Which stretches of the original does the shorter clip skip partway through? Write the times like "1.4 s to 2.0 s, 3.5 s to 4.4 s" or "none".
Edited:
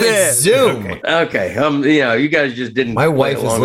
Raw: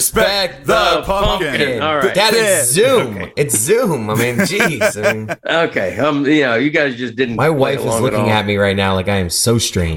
3.2 s to 5.3 s